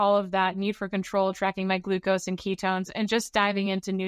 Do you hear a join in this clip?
no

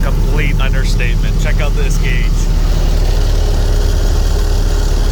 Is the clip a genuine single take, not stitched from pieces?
yes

